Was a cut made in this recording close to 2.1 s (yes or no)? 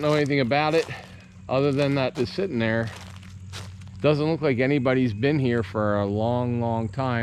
yes